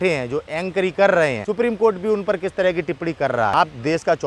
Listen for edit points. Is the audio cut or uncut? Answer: cut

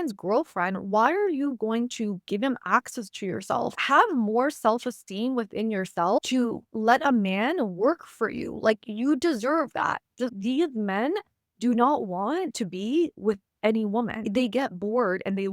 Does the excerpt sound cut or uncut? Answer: cut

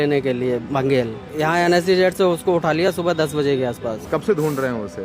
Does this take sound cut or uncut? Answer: cut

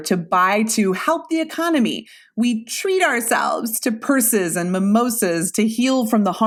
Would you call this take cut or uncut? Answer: uncut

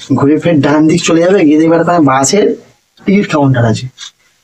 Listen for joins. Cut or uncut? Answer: uncut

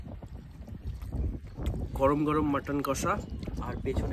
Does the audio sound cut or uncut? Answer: cut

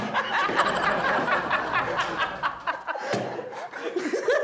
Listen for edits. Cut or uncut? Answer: uncut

